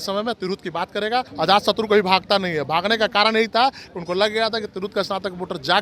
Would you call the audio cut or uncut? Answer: cut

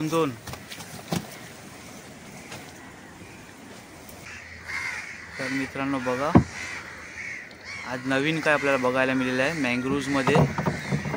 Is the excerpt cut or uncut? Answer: cut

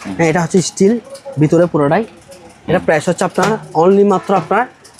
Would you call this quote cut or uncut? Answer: uncut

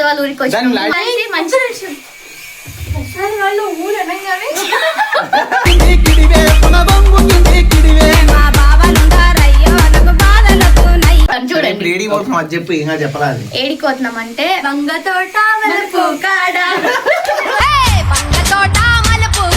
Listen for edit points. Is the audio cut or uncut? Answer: cut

